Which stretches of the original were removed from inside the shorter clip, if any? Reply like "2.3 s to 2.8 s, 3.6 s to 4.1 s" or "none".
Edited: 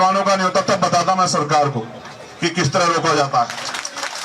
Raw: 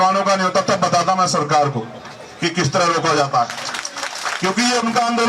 none